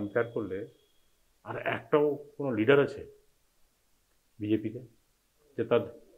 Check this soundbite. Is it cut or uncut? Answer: uncut